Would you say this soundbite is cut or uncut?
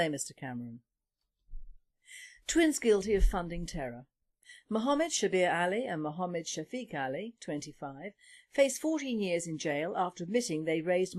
uncut